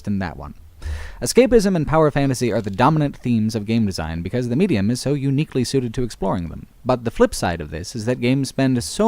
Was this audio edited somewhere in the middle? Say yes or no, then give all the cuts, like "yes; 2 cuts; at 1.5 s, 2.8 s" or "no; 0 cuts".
yes; 1 cut; at 6.5 s